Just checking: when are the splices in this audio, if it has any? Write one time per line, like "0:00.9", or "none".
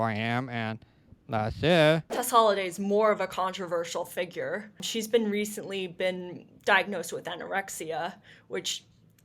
0:02.1